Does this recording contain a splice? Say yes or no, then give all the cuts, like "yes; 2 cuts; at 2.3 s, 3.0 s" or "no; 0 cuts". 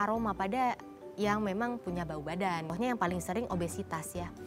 yes; 1 cut; at 2.7 s